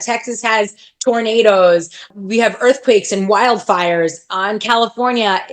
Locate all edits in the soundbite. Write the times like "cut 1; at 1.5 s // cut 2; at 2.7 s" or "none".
cut 1; at 2.1 s

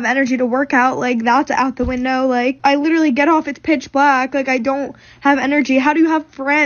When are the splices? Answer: cut 1; at 2.6 s

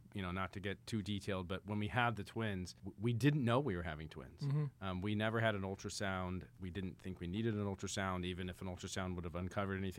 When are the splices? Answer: cut 1; at 2.8 s

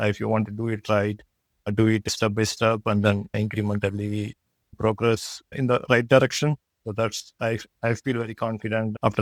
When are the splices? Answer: none

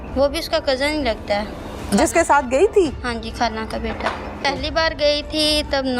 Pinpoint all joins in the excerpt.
cut 1; at 4.4 s

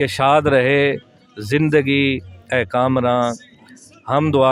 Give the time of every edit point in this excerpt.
none

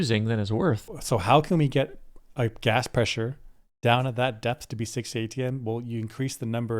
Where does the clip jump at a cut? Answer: cut 1; at 1.0 s

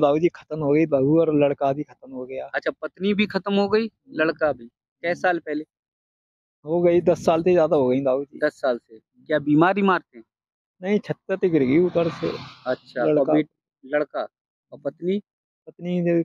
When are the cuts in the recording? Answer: none

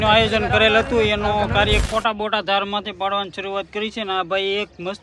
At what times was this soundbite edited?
cut 1; at 1.8 s

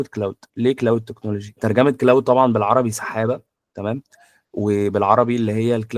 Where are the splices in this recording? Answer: cut 1; at 1.5 s

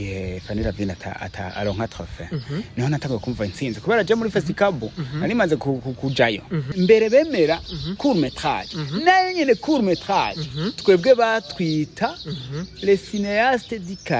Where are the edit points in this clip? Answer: cut 1; at 6.7 s

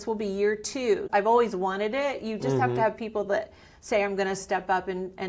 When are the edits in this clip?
cut 1; at 1.0 s

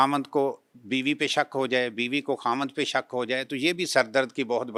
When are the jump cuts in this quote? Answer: none

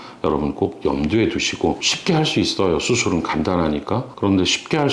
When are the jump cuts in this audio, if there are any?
cut 1; at 1.9 s

